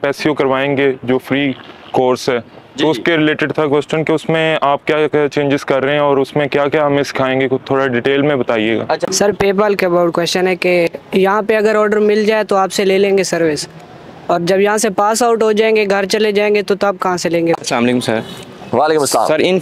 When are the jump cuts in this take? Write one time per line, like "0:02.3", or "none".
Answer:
0:09.0
0:17.6